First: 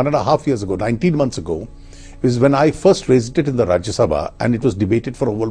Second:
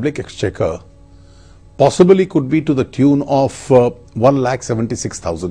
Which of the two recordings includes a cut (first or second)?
second